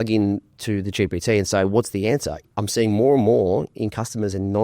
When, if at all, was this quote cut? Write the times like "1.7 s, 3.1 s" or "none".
2.4 s